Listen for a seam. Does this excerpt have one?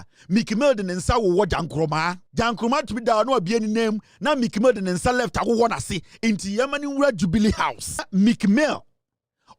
yes; 2 cuts; at 2.2 s, 8.1 s

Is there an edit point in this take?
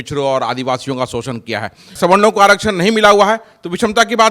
yes; 1 cut; at 2.0 s

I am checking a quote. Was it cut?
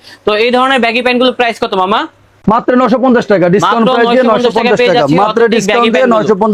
no; 0 cuts

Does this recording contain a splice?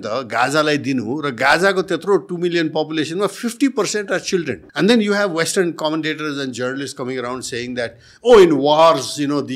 yes; 1 cut; at 4.6 s

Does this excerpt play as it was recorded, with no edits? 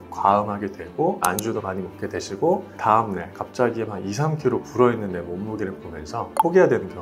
yes; 0 cuts

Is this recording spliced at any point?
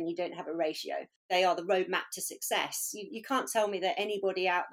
yes; 1 cut; at 1.3 s

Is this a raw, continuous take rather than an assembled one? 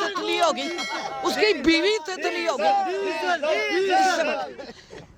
yes; 0 cuts

